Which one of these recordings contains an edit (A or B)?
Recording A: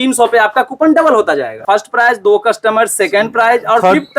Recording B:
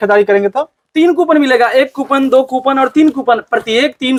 A